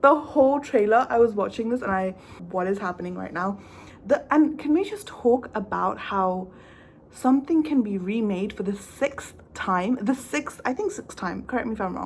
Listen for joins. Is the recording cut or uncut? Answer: cut